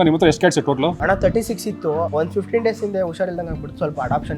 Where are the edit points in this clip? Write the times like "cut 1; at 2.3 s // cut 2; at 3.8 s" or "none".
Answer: cut 1; at 1.0 s // cut 2; at 2.1 s

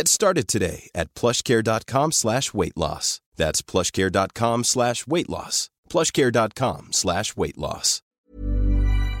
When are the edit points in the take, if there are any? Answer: cut 1; at 8.1 s

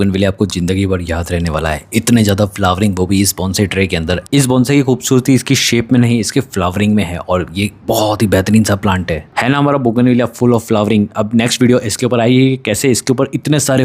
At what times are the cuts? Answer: none

